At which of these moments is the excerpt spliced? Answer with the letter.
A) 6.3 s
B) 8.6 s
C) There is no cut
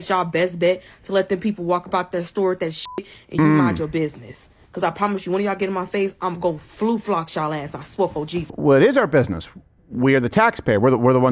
B